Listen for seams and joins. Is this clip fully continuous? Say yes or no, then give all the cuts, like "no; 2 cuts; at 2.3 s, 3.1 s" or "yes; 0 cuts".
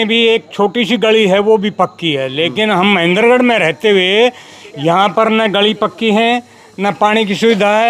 yes; 0 cuts